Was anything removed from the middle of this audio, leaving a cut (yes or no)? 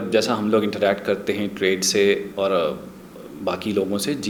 no